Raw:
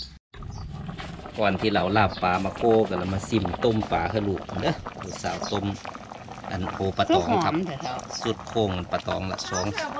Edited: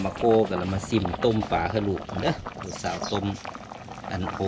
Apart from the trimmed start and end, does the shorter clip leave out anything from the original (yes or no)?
no